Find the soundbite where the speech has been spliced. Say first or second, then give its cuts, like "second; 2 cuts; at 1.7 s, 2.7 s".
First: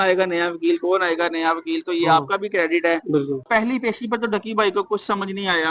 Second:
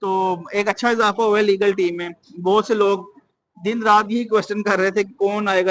first; 1 cut; at 3.4 s